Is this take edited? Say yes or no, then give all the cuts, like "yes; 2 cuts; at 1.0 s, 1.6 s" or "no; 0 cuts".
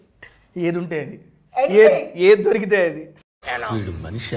no; 0 cuts